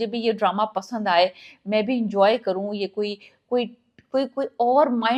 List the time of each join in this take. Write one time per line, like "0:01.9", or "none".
none